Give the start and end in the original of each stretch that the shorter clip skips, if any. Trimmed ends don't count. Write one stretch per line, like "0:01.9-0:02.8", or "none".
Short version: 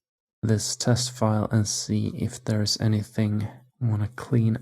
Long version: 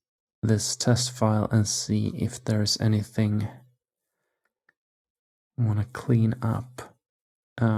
0:03.6-0:05.4